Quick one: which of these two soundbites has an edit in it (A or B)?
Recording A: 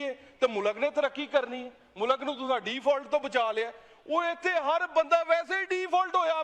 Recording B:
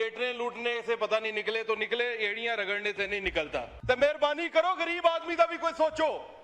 B